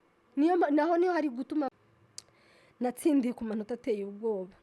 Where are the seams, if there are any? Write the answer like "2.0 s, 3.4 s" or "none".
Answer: 1.7 s